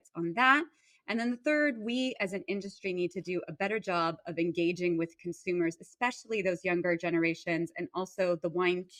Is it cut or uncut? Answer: uncut